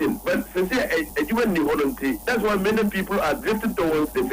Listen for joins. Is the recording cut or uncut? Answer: cut